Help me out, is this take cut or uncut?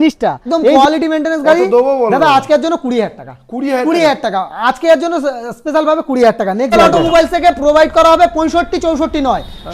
cut